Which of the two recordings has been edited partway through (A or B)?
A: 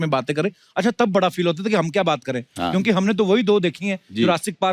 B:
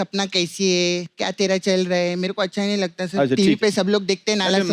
B